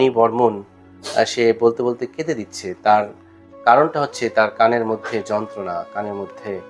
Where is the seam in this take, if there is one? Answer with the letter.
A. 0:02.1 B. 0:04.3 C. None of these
C